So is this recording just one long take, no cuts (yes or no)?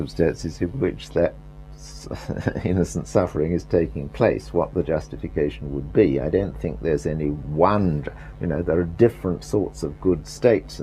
no